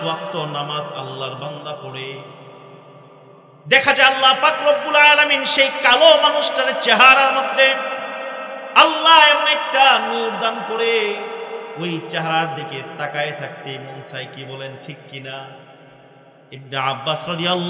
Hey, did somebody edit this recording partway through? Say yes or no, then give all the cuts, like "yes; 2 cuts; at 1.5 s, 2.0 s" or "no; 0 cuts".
no; 0 cuts